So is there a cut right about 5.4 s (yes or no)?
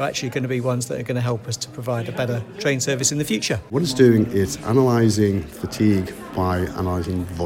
no